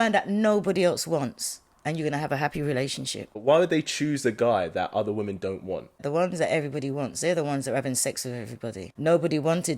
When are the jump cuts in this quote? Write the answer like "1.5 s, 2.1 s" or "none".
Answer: 3.4 s, 6.0 s, 8.9 s